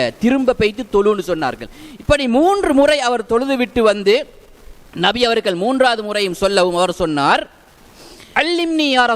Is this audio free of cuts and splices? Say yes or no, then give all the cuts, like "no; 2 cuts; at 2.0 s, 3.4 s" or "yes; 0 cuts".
no; 1 cut; at 8.2 s